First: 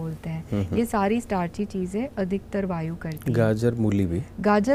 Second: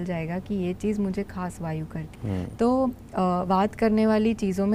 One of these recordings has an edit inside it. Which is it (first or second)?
second